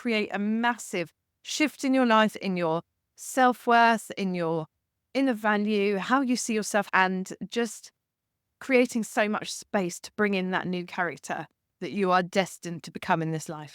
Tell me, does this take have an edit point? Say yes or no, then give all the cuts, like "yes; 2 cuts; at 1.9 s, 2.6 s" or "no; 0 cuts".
yes; 2 cuts; at 2.4 s, 6.9 s